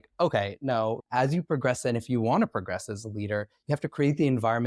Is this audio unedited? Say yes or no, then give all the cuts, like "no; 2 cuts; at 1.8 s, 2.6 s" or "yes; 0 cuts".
yes; 0 cuts